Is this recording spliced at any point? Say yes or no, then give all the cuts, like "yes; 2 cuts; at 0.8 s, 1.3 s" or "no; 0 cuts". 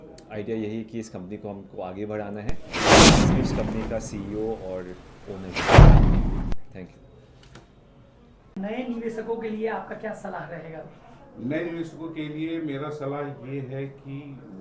yes; 5 cuts; at 2.6 s, 3.6 s, 5.5 s, 6.6 s, 8.6 s